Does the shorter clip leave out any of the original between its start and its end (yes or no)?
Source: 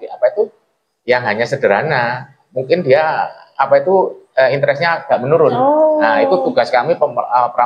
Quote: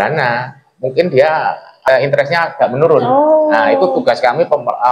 yes